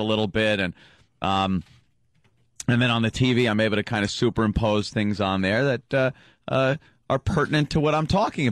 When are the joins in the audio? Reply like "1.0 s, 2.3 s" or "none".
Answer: none